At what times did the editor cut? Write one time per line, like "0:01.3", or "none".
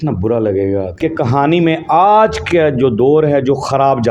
0:00.9

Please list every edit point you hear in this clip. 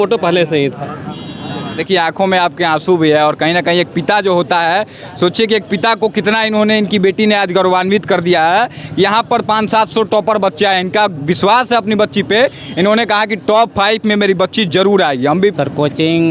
0:01.8
0:15.6

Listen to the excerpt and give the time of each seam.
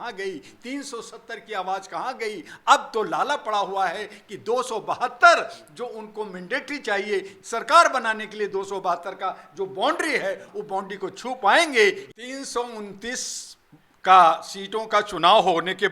0:07.4
0:10.5
0:12.1

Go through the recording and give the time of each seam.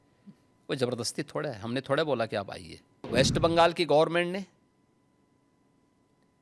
0:03.1

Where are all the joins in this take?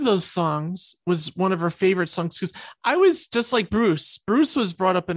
none

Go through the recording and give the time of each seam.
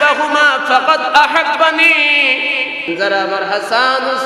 0:02.9

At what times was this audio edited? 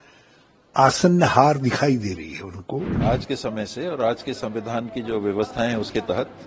0:02.9

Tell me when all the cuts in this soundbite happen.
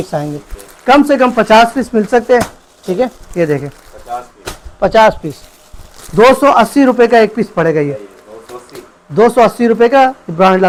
none

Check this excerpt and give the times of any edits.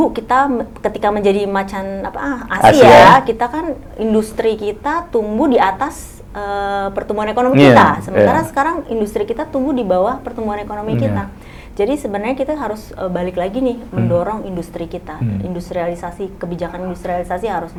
none

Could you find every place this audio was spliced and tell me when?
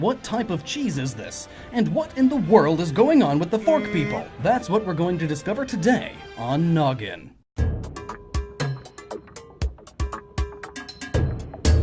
0:04.2

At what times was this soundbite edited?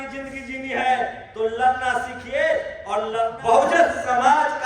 0:03.3

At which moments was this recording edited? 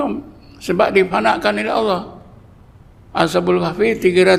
none

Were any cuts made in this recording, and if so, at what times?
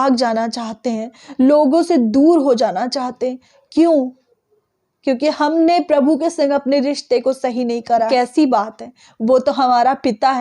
0:08.1

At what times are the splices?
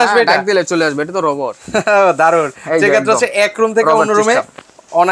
none

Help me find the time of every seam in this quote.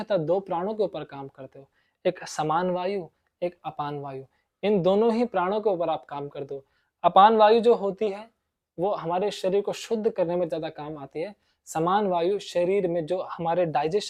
none

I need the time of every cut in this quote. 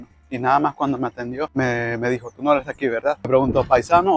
0:01.5
0:03.3

